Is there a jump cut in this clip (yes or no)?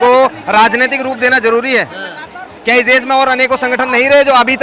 no